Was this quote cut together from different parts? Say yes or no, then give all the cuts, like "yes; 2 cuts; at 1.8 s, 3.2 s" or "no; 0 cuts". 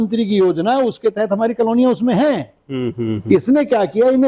no; 0 cuts